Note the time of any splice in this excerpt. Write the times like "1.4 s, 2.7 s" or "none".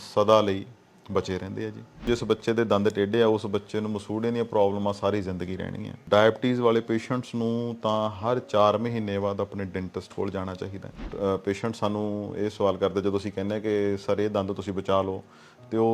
2.1 s, 6.0 s, 11.1 s